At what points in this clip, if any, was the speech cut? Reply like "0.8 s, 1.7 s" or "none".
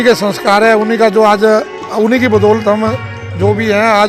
none